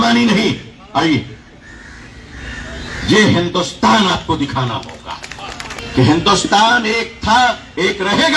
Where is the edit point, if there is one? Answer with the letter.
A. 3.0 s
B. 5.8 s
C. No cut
B